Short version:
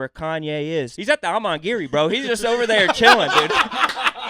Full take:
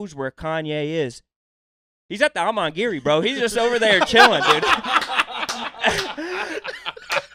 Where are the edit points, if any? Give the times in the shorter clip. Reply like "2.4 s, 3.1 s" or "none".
0.9 s